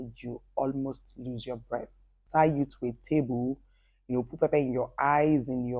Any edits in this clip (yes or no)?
yes